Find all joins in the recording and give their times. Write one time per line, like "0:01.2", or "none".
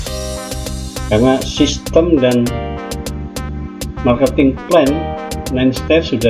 0:01.0